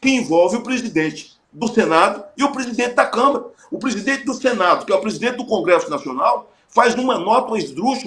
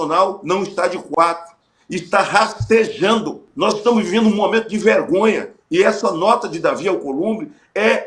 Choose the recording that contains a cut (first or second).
second